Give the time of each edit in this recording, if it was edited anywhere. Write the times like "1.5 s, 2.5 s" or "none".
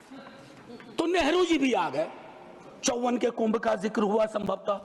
none